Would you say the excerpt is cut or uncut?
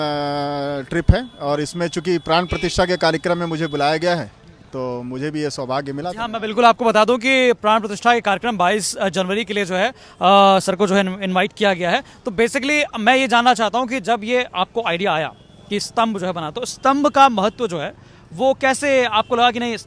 uncut